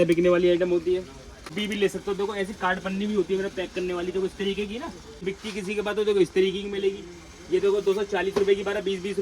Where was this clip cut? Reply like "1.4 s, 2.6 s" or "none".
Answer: 1.6 s, 5.2 s